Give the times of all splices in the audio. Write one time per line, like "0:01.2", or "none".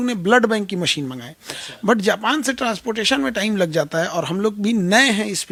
none